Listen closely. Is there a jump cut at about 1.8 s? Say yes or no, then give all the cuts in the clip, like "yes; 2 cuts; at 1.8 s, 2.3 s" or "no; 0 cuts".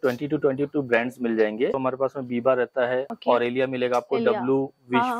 yes; 2 cuts; at 1.8 s, 3.1 s